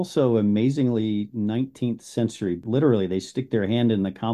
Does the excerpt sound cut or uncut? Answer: cut